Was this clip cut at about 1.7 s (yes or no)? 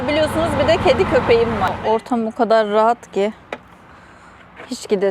yes